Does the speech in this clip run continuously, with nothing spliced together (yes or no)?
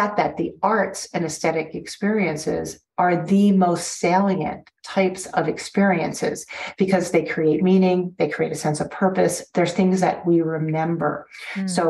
yes